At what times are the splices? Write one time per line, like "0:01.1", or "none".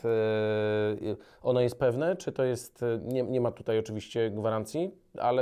none